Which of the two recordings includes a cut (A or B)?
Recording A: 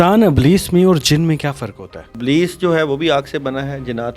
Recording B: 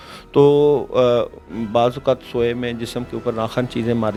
A